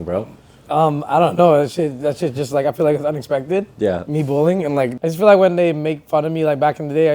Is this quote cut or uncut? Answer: cut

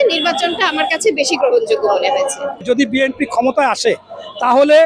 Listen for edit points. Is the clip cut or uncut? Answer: cut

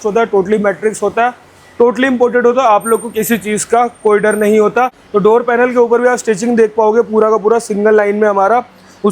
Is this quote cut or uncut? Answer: cut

